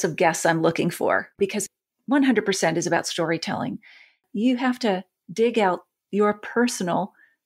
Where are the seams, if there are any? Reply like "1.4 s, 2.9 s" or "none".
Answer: 1.3 s, 4.2 s, 5.2 s